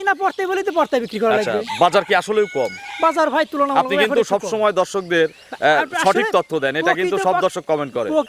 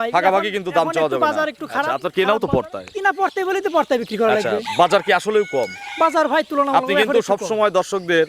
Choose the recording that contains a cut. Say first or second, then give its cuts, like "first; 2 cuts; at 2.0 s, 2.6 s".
second; 1 cut; at 1.9 s